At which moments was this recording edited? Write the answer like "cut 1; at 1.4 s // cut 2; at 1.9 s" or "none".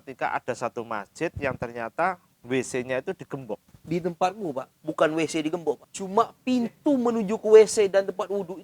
cut 1; at 3.7 s // cut 2; at 4.7 s // cut 3; at 5.9 s